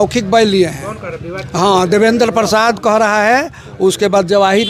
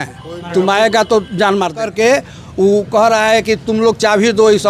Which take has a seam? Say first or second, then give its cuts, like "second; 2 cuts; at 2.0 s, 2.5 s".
second; 1 cut; at 1.8 s